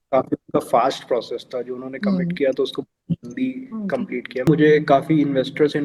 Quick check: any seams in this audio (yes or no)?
yes